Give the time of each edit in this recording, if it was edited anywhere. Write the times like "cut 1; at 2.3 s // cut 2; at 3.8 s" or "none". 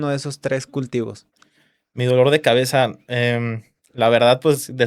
none